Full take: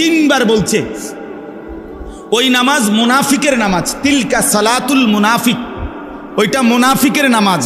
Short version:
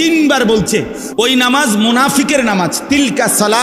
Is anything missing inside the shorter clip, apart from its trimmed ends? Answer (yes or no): yes